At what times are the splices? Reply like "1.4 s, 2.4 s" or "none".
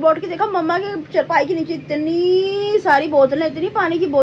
none